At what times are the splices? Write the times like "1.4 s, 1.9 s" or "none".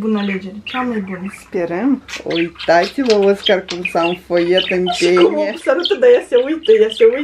2.1 s